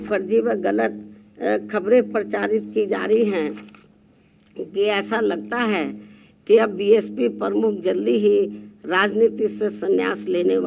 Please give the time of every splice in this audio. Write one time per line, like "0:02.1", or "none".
none